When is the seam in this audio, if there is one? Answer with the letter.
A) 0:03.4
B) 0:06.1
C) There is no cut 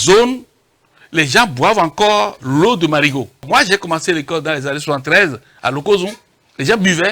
A